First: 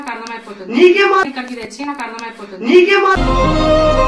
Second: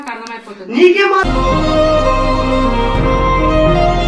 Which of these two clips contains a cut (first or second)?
second